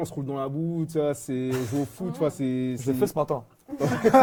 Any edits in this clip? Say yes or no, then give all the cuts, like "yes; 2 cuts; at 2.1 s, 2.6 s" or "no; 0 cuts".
no; 0 cuts